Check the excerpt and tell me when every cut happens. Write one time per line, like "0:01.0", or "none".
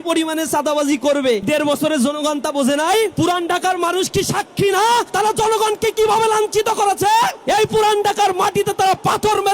0:01.5
0:03.1
0:05.1
0:07.4